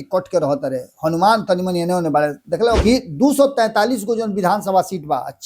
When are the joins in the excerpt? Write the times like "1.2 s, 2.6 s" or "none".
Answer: 2.8 s